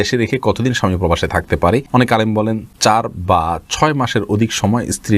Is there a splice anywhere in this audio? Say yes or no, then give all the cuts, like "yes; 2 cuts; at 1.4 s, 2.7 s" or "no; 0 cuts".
yes; 2 cuts; at 1.9 s, 2.7 s